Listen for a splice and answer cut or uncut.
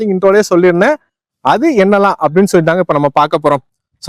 uncut